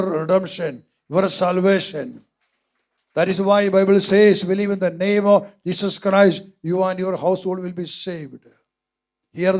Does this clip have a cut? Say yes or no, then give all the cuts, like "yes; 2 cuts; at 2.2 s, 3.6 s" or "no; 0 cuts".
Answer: no; 0 cuts